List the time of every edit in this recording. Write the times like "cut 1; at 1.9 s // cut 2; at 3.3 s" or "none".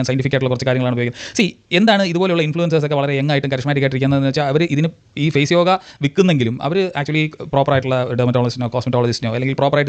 none